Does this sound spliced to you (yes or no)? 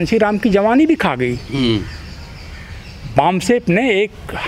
no